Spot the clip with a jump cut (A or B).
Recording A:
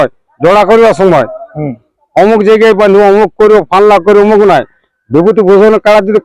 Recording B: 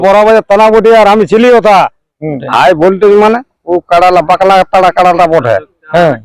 B